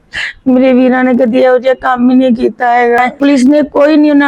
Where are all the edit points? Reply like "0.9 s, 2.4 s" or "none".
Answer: 3.0 s